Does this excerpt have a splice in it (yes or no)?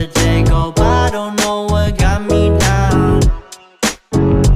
no